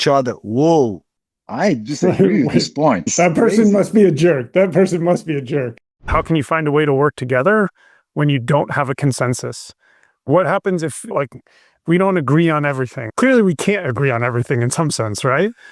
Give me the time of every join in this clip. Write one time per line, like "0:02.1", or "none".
0:03.1
0:06.1
0:11.1
0:13.1